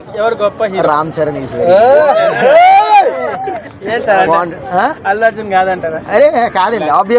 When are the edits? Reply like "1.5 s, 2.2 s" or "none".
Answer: none